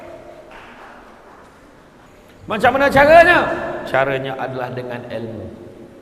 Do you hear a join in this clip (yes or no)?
yes